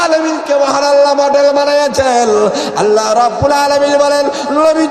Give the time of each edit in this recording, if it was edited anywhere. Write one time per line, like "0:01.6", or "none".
none